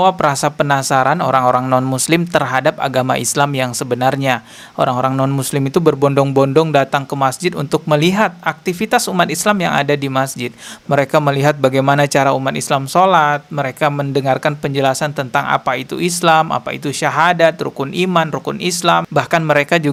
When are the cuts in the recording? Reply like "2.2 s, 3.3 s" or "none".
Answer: none